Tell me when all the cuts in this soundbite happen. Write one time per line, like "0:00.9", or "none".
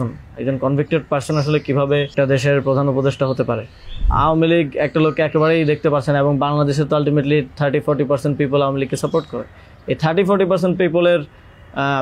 0:02.1
0:04.1

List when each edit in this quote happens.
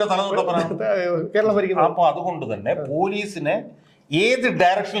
none

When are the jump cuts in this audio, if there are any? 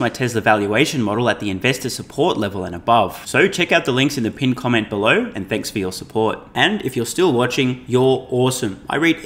none

